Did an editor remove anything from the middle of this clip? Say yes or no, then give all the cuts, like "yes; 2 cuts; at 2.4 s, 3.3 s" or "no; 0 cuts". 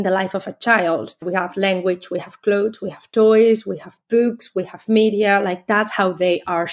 yes; 1 cut; at 1.1 s